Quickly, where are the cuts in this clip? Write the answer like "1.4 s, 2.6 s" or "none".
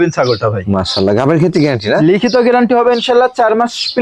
none